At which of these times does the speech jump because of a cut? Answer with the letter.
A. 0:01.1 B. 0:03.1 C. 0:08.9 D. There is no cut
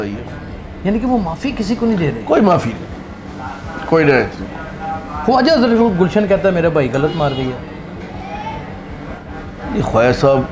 D